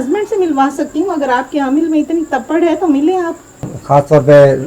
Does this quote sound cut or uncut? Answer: cut